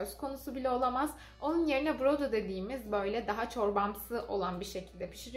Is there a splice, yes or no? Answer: no